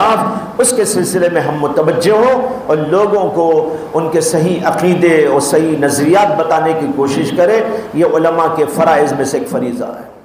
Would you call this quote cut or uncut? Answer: uncut